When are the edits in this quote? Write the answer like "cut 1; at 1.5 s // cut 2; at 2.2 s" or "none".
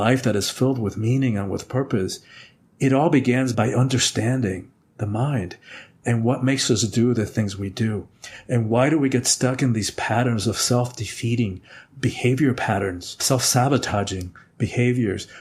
none